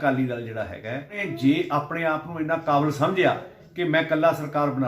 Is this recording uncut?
no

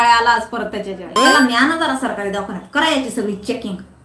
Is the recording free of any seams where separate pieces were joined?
no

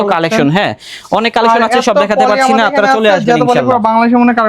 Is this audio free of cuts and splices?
yes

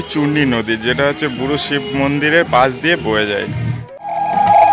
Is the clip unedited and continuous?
yes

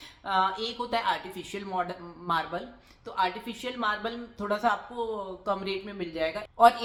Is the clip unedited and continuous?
yes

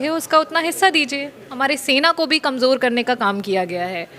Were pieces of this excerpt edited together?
yes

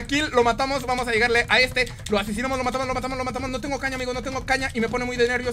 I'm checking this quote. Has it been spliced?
no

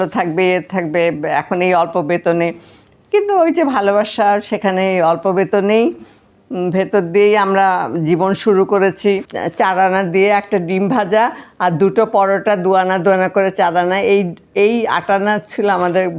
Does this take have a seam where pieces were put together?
yes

